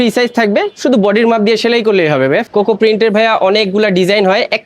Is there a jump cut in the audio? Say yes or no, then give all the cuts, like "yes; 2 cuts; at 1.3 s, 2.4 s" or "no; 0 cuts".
yes; 1 cut; at 2.4 s